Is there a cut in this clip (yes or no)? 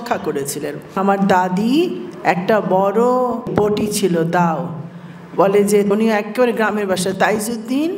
yes